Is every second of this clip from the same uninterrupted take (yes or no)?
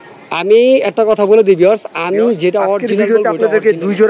no